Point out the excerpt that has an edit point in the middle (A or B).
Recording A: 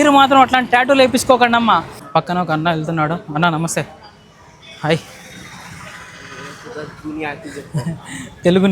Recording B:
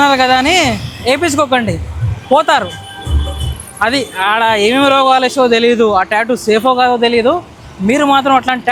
A